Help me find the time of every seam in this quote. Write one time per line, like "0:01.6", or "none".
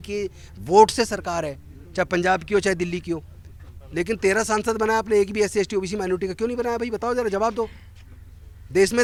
none

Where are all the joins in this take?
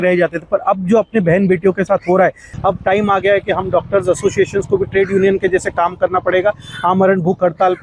0:02.5

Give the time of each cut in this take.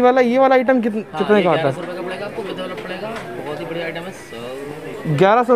none

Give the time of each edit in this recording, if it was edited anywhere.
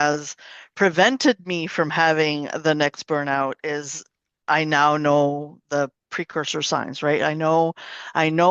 none

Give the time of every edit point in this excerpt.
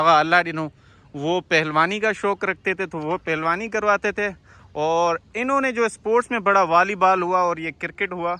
none

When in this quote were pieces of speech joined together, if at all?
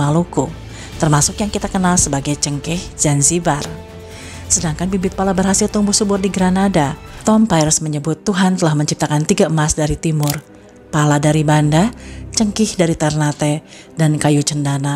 0:07.1

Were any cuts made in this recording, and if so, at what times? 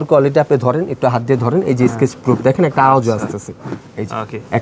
none

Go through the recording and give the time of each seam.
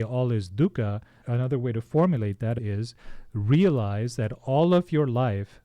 0:01.1
0:02.6

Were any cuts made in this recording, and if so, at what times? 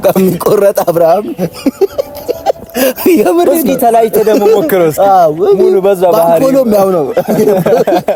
none

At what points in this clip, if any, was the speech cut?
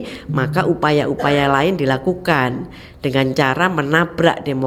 none

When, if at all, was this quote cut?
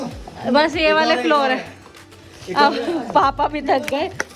none

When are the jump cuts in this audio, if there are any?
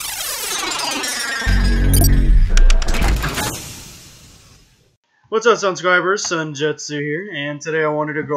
none

